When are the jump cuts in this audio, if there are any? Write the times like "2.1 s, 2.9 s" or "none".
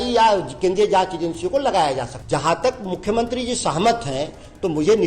2.2 s